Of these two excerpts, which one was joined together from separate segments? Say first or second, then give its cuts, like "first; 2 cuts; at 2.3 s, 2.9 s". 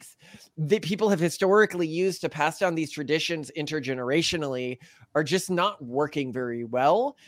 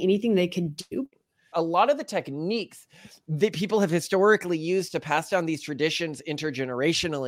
second; 1 cut; at 1.1 s